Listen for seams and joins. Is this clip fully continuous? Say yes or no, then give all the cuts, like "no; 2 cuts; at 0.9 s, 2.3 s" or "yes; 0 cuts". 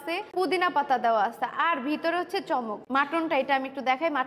no; 1 cut; at 2.8 s